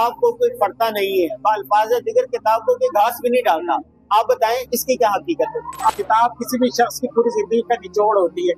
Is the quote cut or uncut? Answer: cut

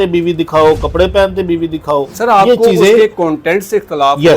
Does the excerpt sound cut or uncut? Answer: cut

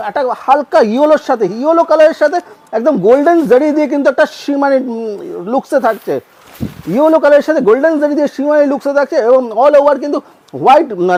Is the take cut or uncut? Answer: uncut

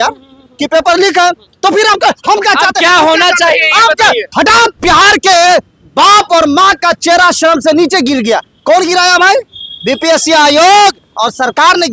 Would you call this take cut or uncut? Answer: cut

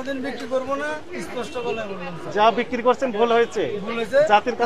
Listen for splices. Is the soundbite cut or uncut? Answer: uncut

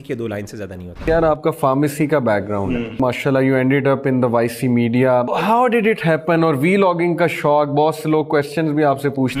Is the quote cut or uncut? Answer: cut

